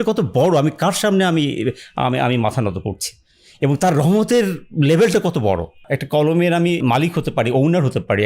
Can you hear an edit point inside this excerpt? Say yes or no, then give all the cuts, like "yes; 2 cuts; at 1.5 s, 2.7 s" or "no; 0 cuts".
yes; 2 cuts; at 5.8 s, 6.8 s